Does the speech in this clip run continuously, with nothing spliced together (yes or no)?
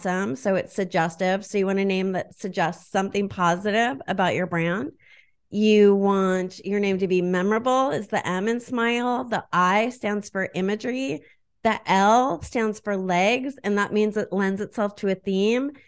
yes